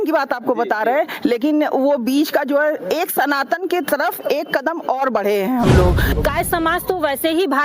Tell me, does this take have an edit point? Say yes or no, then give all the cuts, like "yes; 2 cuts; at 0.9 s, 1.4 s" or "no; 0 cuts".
yes; 1 cut; at 6.2 s